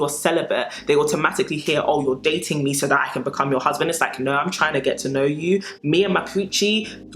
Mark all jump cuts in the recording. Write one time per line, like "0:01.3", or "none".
none